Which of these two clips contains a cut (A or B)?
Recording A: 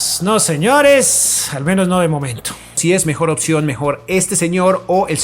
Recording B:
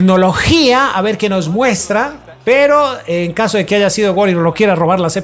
A